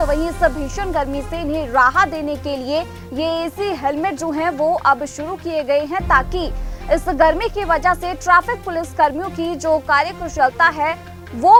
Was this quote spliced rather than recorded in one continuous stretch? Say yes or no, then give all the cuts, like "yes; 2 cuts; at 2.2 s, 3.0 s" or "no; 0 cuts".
no; 0 cuts